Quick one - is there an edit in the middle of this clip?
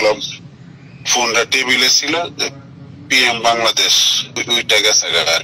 yes; 1 cut; at 4.4 s

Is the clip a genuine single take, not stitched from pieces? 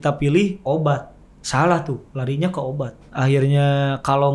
no; 1 cut; at 3.1 s

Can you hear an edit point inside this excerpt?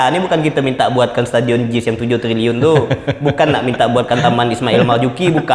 no; 0 cuts

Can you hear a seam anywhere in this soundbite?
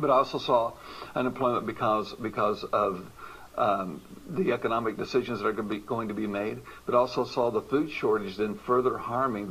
yes; 1 cut; at 1.6 s

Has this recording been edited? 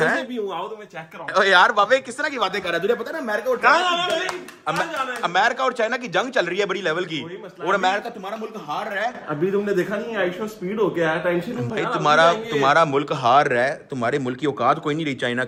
no; 0 cuts

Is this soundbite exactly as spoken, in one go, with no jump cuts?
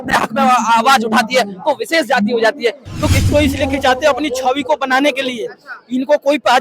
no; 1 cut; at 3.3 s

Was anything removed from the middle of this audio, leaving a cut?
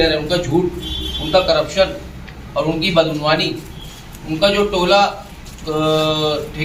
no; 0 cuts

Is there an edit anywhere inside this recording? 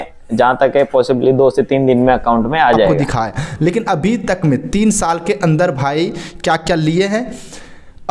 yes; 1 cut; at 2.9 s

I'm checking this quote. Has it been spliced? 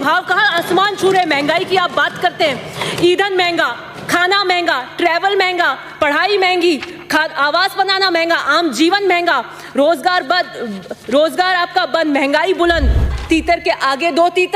yes; 1 cut; at 13.1 s

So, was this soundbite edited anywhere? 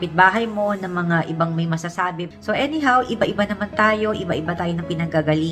yes; 1 cut; at 2.2 s

